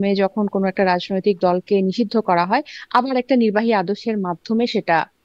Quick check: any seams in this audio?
no; 0 cuts

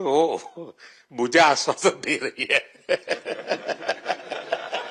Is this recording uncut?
yes; 0 cuts

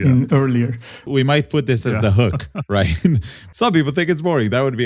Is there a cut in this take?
yes; 2 cuts; at 1.0 s, 3.4 s

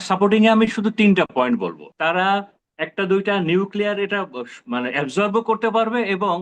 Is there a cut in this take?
yes; 2 cuts; at 1.8 s, 2.6 s

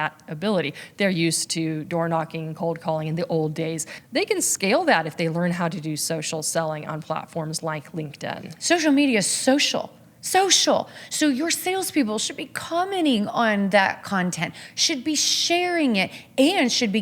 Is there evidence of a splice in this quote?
yes; 2 cuts; at 3.9 s, 8.5 s

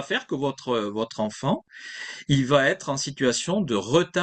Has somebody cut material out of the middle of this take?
no; 0 cuts

